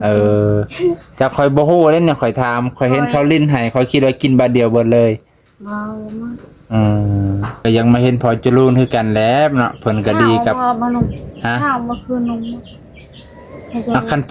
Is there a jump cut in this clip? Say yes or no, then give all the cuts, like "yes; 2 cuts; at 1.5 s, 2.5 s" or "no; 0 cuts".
yes; 1 cut; at 7.6 s